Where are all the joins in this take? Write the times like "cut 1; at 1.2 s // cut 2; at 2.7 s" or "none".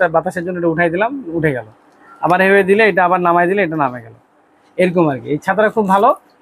none